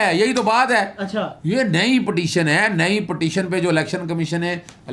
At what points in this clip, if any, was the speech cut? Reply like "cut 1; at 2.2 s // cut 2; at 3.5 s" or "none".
none

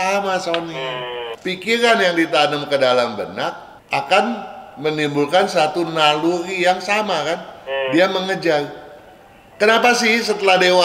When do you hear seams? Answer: cut 1; at 1.2 s

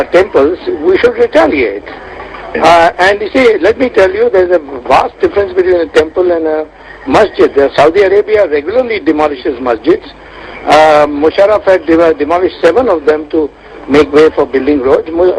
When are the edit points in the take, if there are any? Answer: cut 1; at 13.9 s

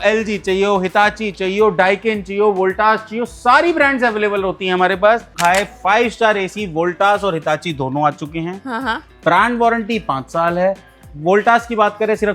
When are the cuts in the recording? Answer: cut 1; at 5.3 s

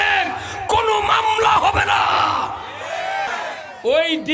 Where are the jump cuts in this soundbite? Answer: cut 1; at 3.3 s

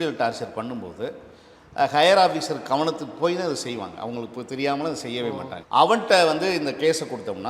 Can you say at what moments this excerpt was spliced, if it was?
cut 1; at 5.5 s

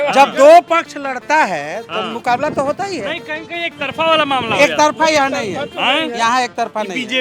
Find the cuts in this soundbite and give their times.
none

